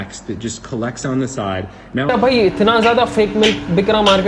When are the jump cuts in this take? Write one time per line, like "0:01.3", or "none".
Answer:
0:02.1